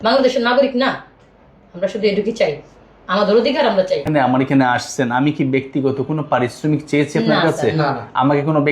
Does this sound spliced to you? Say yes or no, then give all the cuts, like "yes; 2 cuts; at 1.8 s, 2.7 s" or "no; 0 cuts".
yes; 1 cut; at 4.0 s